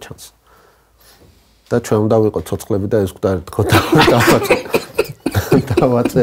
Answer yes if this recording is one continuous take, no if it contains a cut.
yes